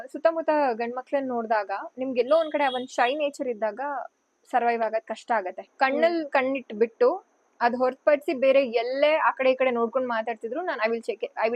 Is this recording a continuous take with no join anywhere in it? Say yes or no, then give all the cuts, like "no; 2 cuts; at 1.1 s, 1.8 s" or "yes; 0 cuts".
no; 1 cut; at 5.6 s